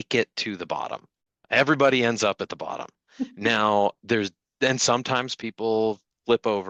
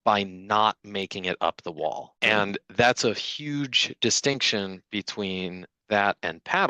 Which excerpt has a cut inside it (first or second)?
second